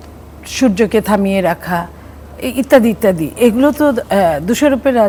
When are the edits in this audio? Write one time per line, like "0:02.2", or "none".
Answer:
none

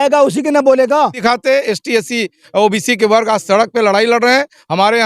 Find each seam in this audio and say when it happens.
0:01.2

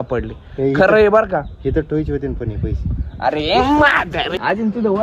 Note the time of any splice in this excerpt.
0:02.8
0:04.1

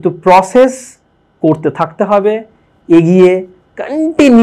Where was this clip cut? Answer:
none

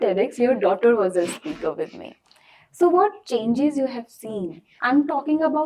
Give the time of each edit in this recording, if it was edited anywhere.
0:04.7

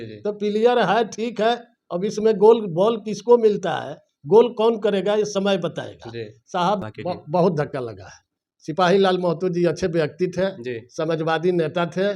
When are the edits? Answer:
0:06.9

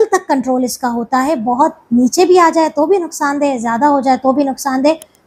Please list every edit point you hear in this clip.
none

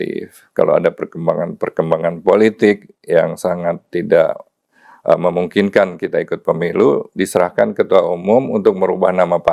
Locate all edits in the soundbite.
none

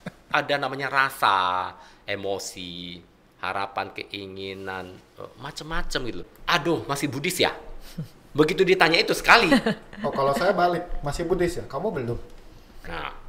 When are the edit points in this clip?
0:06.3

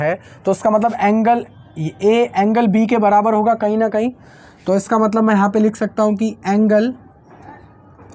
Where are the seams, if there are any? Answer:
none

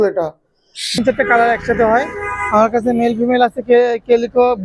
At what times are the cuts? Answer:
0:01.0

